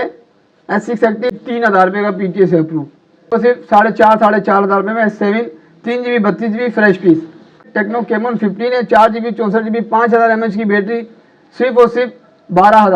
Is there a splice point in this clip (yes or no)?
yes